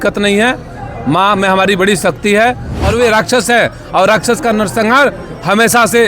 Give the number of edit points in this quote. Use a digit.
1